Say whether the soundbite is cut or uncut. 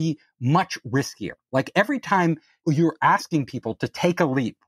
cut